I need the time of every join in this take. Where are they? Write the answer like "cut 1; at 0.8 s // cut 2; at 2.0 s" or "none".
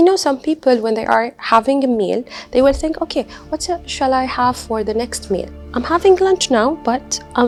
none